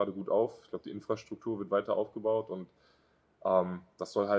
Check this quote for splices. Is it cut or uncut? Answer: uncut